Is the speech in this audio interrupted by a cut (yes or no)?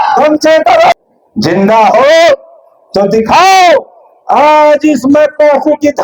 yes